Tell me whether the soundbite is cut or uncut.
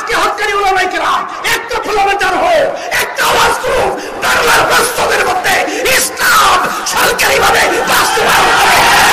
uncut